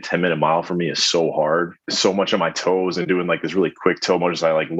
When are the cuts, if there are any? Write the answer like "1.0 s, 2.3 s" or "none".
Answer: 1.8 s